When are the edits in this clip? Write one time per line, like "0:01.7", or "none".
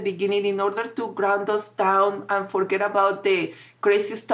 none